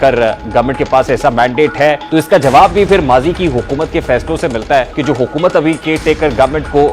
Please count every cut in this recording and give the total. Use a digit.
2